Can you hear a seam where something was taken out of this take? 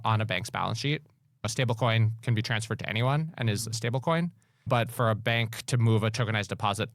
yes; 2 cuts; at 1.5 s, 4.7 s

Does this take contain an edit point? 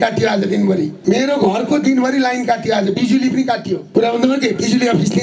yes; 2 cuts; at 1.0 s, 3.8 s

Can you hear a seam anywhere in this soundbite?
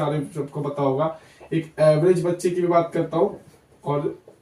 no; 0 cuts

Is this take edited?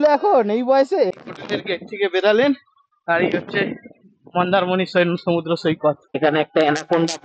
yes; 2 cuts; at 1.2 s, 6.2 s

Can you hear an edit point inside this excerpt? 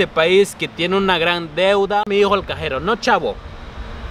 yes; 1 cut; at 2.1 s

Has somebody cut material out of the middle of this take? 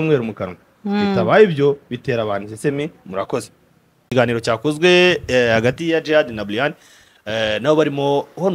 yes; 1 cut; at 4.0 s

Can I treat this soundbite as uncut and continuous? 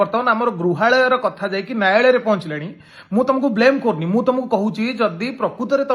yes; 0 cuts

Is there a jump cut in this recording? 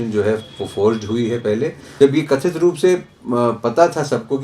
yes; 1 cut; at 1.8 s

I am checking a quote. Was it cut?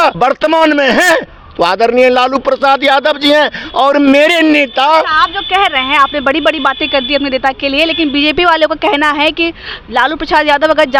no; 0 cuts

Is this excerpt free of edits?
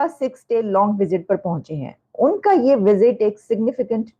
yes; 0 cuts

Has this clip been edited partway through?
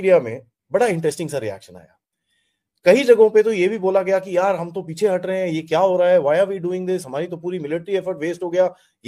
no; 0 cuts

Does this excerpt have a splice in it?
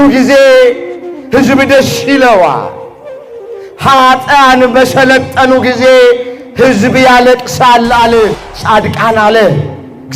yes; 1 cut; at 8.4 s

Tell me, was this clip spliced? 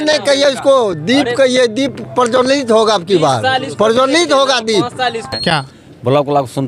yes; 1 cut; at 5.3 s

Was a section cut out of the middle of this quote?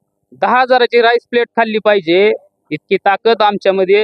no; 0 cuts

